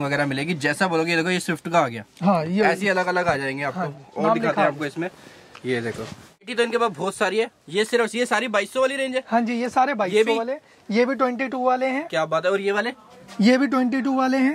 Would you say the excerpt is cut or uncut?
uncut